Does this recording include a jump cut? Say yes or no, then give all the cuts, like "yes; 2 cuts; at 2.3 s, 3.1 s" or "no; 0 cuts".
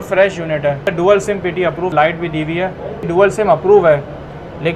yes; 3 cuts; at 0.9 s, 1.9 s, 3.1 s